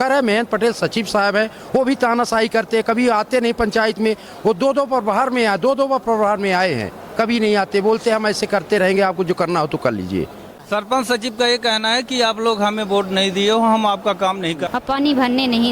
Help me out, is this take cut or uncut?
cut